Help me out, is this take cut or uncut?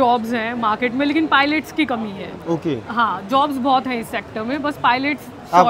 uncut